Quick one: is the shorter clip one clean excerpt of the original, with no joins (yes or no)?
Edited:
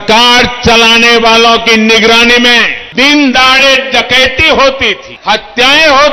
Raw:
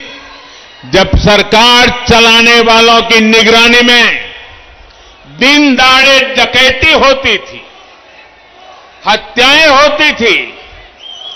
no